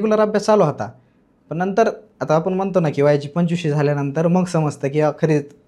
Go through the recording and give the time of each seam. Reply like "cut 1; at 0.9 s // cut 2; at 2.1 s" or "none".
none